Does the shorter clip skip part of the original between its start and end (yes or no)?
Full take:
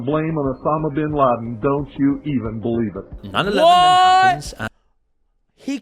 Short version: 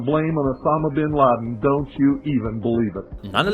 no